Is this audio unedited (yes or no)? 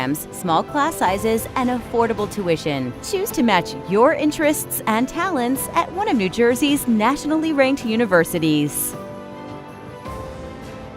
no